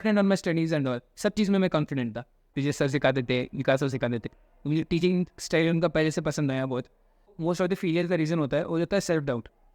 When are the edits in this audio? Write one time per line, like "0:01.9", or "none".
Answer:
0:02.4
0:07.4